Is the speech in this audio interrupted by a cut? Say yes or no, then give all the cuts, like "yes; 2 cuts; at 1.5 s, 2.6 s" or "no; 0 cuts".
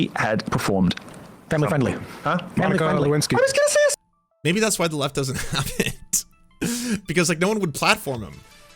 yes; 1 cut; at 3.9 s